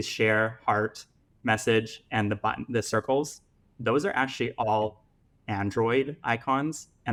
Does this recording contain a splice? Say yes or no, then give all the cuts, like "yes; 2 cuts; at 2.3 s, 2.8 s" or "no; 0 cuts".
no; 0 cuts